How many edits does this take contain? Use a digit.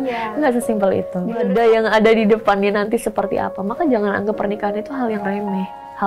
1